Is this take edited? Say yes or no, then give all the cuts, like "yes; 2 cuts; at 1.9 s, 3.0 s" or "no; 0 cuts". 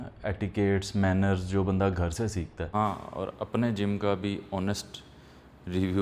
yes; 1 cut; at 2.7 s